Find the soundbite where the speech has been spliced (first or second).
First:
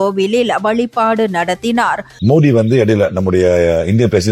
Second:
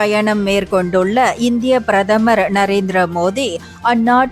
first